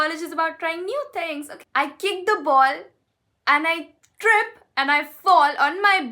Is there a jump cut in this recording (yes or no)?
yes